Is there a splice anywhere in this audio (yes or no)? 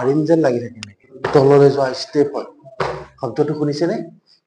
yes